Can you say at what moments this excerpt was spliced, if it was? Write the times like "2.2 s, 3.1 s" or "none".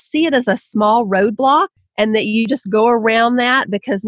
2.3 s